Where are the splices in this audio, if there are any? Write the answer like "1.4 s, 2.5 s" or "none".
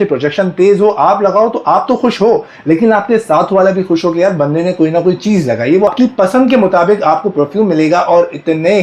5.9 s